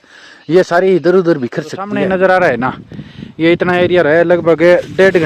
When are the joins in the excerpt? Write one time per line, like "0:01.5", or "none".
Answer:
0:01.9